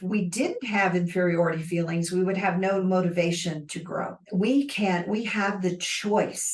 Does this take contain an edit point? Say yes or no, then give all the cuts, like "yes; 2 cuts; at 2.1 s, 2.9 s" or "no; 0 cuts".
yes; 1 cut; at 4.2 s